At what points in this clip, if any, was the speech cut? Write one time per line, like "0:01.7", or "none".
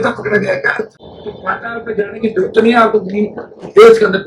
0:01.1